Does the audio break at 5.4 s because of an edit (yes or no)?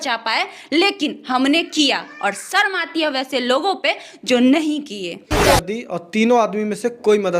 yes